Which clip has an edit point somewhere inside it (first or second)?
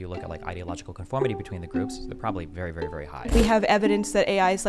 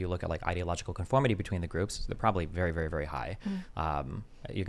first